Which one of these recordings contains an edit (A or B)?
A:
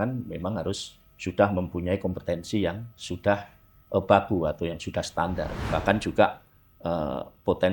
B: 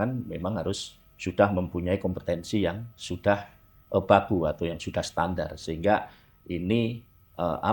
A